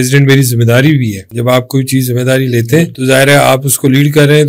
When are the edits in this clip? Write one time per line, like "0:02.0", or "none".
0:01.2
0:02.9